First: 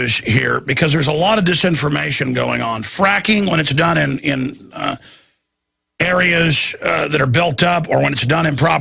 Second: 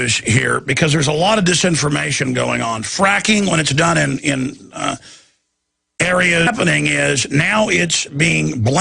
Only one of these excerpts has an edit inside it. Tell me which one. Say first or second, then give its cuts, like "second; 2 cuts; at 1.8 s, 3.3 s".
first; 1 cut; at 6.5 s